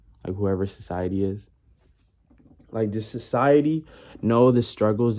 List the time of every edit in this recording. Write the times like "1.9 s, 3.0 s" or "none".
none